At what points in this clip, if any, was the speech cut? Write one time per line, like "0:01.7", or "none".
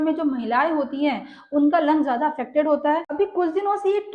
0:03.1